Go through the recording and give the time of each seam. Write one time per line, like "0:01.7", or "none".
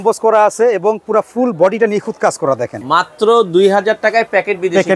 0:02.7